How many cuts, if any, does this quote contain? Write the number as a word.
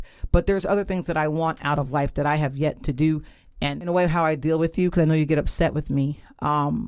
one